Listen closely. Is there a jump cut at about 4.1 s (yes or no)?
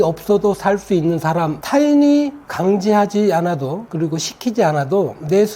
no